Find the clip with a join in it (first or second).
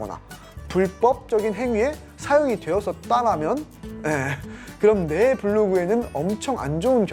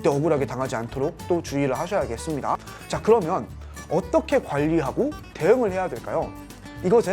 second